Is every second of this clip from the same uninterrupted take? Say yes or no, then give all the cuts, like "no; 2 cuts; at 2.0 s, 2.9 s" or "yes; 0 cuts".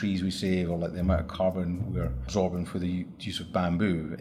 yes; 0 cuts